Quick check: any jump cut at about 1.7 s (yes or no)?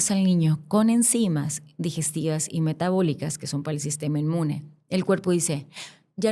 no